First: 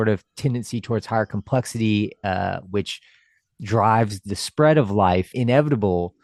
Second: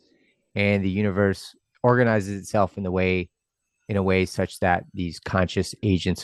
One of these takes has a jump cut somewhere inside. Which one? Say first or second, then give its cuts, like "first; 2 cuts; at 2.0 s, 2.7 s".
first; 1 cut; at 5.3 s